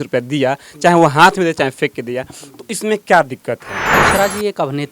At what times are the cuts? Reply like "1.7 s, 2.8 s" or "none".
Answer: 3.9 s